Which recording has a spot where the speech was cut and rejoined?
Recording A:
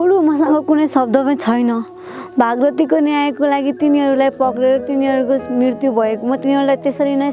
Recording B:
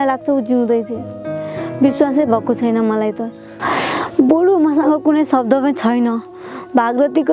B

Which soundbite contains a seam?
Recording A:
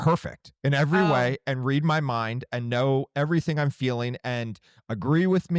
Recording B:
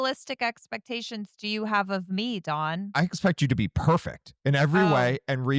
B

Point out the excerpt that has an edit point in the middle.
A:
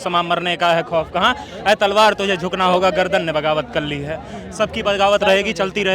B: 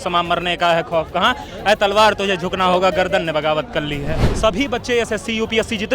B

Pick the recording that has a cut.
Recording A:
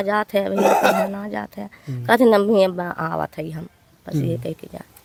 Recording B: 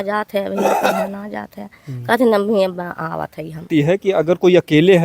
B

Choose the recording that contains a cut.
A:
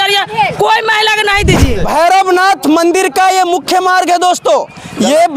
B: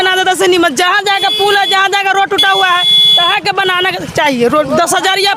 A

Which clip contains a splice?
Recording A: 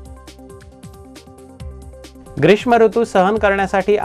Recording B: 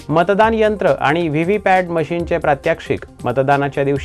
A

